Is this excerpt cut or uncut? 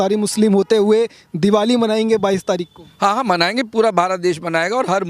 uncut